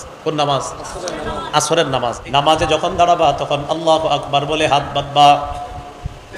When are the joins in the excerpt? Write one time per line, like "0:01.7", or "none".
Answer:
0:02.2